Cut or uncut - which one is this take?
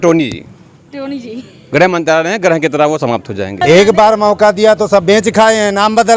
cut